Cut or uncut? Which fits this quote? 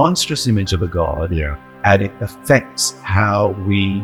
uncut